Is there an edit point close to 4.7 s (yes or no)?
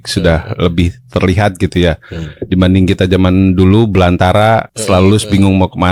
yes